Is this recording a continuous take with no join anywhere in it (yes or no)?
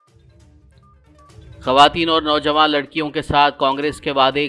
no